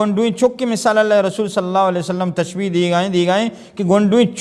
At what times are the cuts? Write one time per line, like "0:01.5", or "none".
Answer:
none